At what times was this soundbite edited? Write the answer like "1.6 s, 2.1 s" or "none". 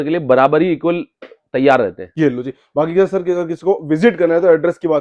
none